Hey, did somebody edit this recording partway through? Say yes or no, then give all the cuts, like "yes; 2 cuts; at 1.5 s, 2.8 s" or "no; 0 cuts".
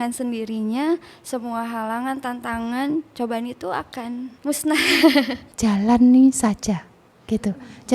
yes; 2 cuts; at 4.3 s, 5.4 s